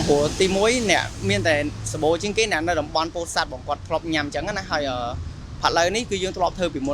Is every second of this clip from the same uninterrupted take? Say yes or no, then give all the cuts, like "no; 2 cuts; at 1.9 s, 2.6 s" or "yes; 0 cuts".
yes; 0 cuts